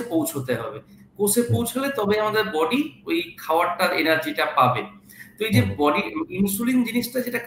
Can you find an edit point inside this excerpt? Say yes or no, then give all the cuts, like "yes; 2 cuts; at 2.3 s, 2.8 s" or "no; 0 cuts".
no; 0 cuts